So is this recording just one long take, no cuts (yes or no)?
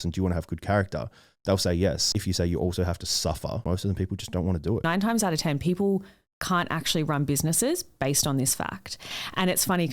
no